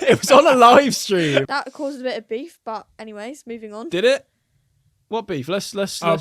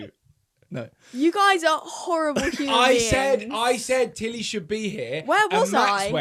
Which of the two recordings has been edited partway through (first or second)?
first